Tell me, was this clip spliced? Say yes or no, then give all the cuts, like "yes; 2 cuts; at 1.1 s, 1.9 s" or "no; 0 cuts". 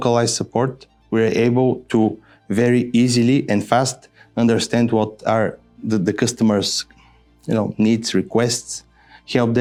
no; 0 cuts